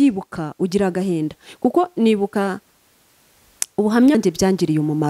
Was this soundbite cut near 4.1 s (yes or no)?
yes